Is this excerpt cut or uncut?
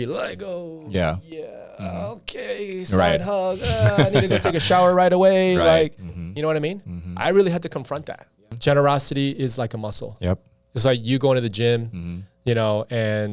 cut